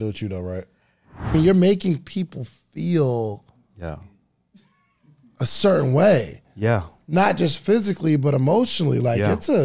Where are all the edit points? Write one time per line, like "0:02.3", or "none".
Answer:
0:01.3